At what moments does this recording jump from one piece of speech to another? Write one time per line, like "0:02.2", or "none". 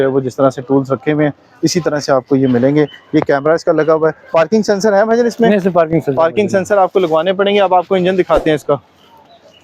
none